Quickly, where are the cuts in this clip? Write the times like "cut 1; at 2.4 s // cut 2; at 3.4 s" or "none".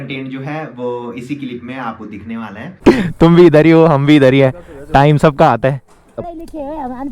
cut 1; at 2.7 s // cut 2; at 6.2 s